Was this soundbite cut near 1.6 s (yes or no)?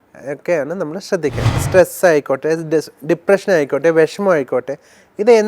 yes